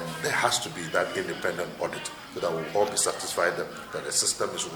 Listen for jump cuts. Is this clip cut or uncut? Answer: uncut